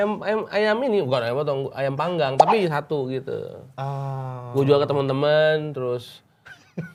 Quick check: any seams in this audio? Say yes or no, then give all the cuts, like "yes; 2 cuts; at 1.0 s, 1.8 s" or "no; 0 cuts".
no; 0 cuts